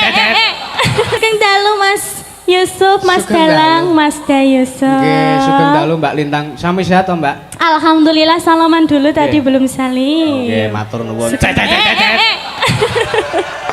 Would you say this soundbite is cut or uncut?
cut